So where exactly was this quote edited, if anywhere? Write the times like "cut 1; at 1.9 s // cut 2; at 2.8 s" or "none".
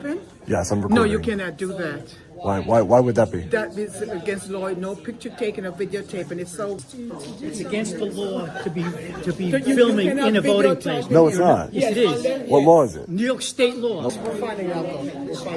cut 1; at 6.8 s // cut 2; at 14.1 s